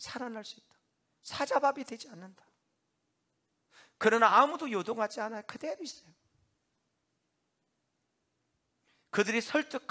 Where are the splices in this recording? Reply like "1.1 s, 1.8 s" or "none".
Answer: none